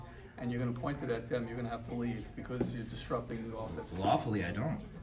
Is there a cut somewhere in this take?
no; 0 cuts

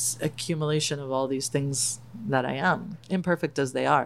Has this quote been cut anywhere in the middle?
yes; 1 cut; at 3.0 s

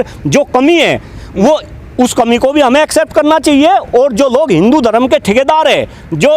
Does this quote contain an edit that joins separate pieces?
no; 0 cuts

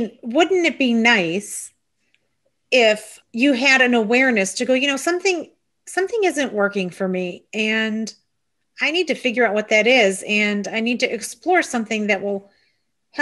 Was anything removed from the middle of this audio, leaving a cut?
yes; 1 cut; at 3.2 s

